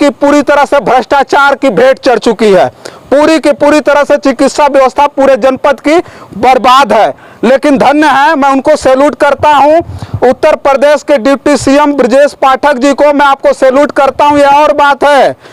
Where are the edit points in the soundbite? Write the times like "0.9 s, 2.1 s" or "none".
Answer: none